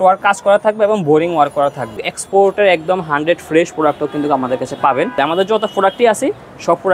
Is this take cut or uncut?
cut